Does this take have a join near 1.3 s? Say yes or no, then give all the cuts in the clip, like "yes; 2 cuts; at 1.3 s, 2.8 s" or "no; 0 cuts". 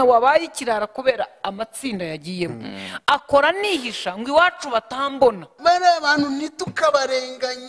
no; 1 cut; at 5.5 s